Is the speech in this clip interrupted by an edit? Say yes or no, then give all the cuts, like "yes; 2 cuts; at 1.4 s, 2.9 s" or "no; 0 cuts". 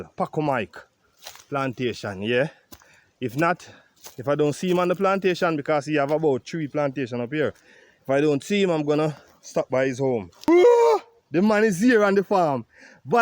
yes; 1 cut; at 10.5 s